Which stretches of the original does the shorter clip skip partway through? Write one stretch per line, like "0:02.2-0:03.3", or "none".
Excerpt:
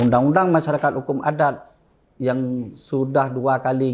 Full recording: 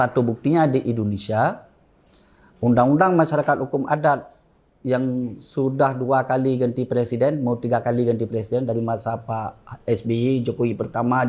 none